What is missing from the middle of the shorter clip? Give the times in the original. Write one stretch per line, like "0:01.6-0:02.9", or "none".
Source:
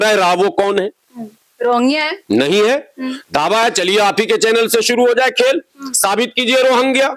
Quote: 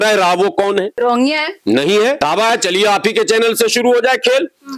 0:00.9-0:01.5
0:02.8-0:03.3